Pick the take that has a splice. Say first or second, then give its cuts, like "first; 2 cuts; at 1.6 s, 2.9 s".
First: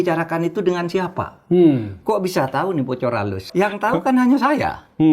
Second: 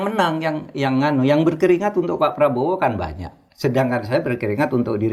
first; 1 cut; at 3.4 s